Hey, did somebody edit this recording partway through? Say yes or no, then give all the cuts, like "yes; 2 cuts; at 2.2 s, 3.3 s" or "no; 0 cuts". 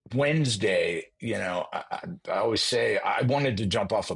no; 0 cuts